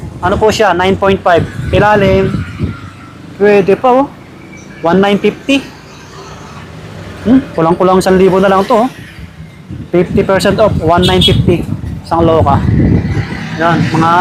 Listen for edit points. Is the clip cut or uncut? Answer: uncut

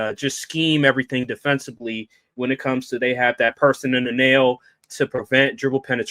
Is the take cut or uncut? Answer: uncut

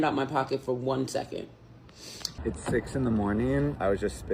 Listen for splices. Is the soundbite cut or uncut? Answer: cut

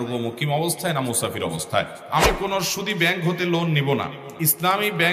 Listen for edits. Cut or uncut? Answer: cut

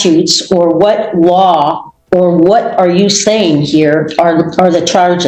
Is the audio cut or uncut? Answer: uncut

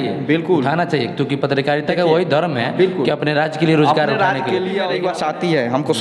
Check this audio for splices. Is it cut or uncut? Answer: cut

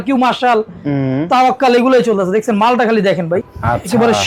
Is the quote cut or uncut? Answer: uncut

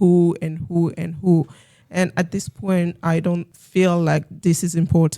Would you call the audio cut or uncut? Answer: cut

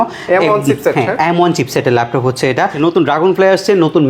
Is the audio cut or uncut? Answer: cut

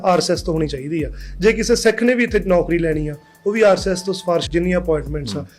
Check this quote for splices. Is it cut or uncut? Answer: cut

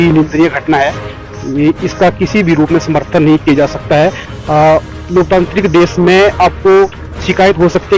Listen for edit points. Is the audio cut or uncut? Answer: uncut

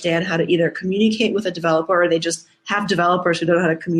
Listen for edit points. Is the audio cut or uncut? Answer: uncut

